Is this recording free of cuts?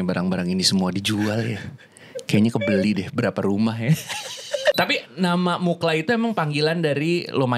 no; 1 cut; at 4.7 s

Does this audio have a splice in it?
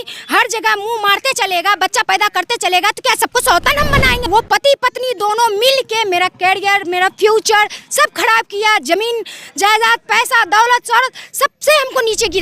yes; 1 cut; at 4.3 s

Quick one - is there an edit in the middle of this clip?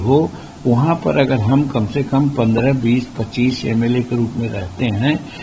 no; 0 cuts

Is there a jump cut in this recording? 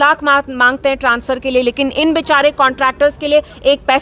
no; 0 cuts

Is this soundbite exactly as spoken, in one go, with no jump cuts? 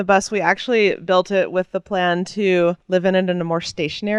yes; 0 cuts

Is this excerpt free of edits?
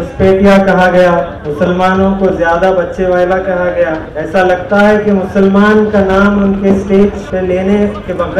no; 3 cuts; at 1.4 s, 4.1 s, 7.2 s

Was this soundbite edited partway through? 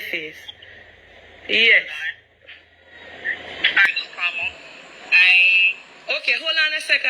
yes; 1 cut; at 3.8 s

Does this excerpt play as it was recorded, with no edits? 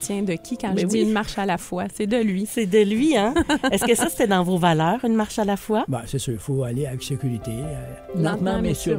no; 1 cut; at 8.1 s

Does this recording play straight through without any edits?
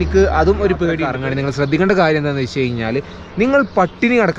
no; 1 cut; at 1.1 s

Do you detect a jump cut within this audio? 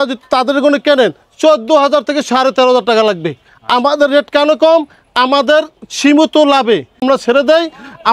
no; 0 cuts

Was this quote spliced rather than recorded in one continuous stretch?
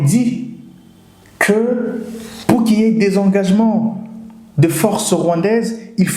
no; 0 cuts

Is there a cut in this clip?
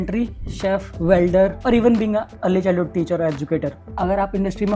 yes; 4 cuts; at 0.9 s, 1.6 s, 2.3 s, 3.8 s

